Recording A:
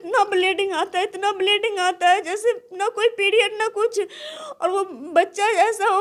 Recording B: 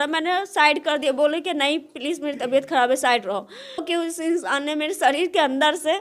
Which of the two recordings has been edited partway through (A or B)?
B